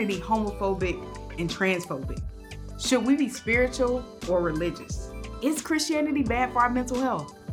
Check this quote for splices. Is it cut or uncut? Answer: uncut